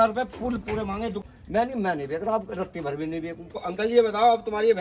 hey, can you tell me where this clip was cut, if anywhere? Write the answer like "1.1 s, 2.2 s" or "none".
1.2 s, 3.6 s